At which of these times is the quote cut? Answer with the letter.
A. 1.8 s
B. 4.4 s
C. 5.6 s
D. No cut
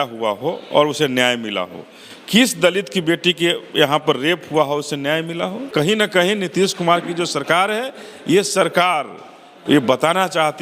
C